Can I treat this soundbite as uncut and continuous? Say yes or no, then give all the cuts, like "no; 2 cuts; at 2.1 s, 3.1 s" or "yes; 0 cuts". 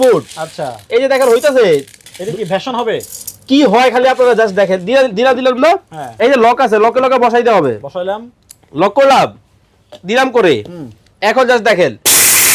yes; 0 cuts